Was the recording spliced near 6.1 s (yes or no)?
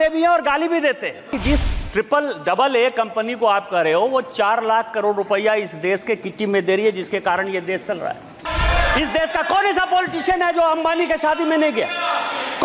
no